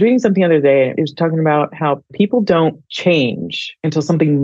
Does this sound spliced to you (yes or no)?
yes